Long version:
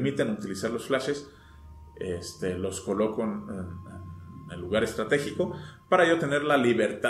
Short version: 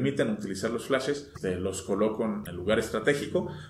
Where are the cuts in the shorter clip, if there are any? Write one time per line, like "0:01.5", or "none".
0:01.3
0:02.5